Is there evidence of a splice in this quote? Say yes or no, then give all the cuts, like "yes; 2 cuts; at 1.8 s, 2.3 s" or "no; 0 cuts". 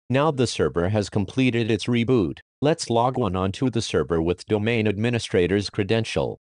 yes; 1 cut; at 2.7 s